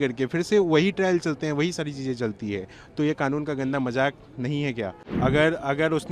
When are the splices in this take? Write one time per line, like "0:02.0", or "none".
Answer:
0:05.0